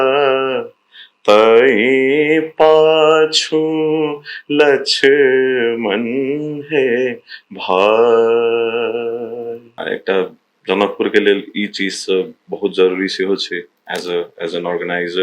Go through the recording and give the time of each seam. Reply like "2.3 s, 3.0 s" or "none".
9.8 s